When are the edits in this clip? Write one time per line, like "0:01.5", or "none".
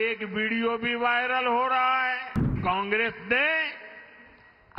0:02.5